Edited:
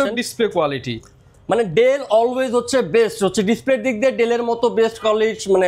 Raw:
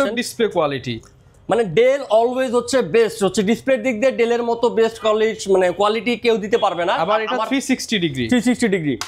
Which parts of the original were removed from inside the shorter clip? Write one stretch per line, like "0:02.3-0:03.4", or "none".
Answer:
none